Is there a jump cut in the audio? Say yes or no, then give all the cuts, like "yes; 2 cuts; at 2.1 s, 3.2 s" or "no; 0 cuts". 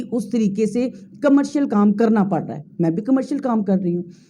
no; 0 cuts